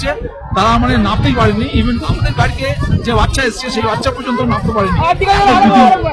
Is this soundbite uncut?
yes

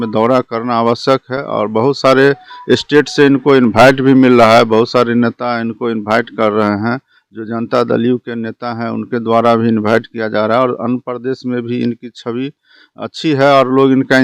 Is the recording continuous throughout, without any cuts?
yes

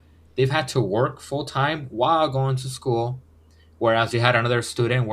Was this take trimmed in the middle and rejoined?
no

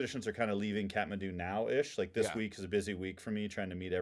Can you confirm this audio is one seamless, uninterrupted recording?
yes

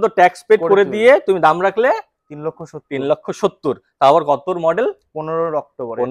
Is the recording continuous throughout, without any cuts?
yes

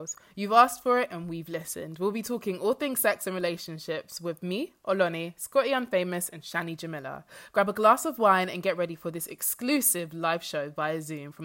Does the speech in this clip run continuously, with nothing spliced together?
yes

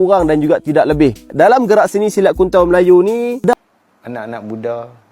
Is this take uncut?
no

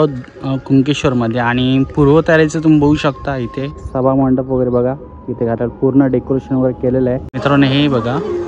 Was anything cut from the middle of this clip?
yes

